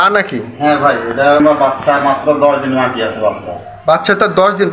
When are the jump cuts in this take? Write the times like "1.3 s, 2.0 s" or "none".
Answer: 1.4 s

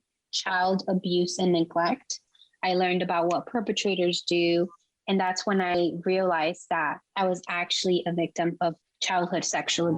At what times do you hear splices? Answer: 2.4 s, 7.0 s, 8.9 s

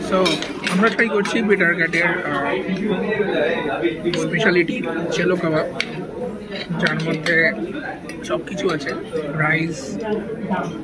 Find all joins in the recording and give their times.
none

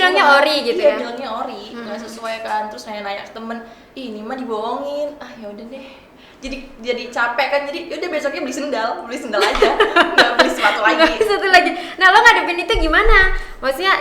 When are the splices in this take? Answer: none

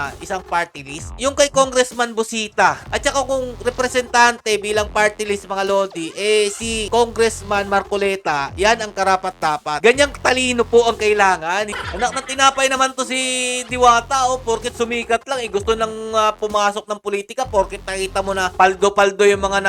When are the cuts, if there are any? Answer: 2.8 s, 11.8 s

